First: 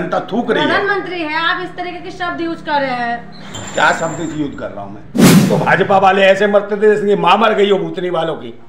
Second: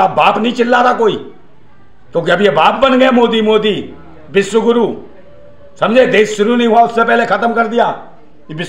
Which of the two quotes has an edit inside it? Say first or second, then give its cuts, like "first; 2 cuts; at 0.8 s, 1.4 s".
first; 2 cuts; at 3.5 s, 5.4 s